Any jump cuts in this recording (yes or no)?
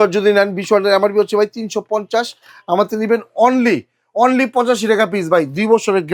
no